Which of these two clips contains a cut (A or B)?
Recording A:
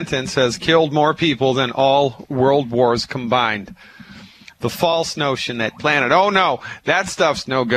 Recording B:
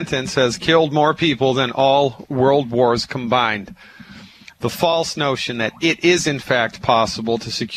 B